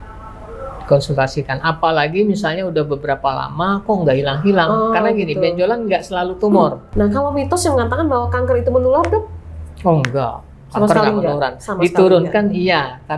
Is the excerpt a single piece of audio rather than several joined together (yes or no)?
no